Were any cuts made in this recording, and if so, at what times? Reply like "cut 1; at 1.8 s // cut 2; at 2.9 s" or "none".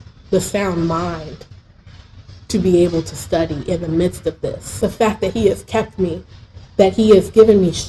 cut 1; at 4.6 s